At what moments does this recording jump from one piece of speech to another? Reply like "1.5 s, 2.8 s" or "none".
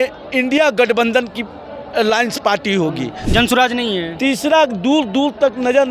3.2 s